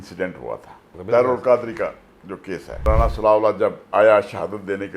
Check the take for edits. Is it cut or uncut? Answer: cut